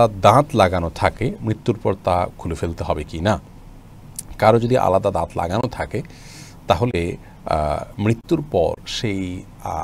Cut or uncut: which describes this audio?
uncut